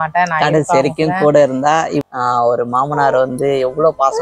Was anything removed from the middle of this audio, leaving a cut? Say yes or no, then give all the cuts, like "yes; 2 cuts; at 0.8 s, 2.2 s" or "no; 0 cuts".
yes; 1 cut; at 2.0 s